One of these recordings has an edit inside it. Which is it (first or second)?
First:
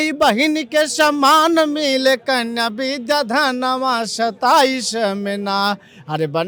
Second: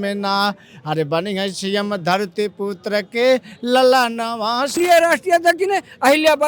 second